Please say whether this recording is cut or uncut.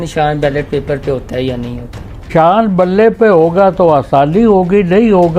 cut